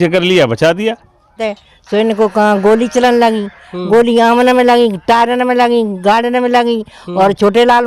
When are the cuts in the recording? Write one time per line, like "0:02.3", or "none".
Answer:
0:01.4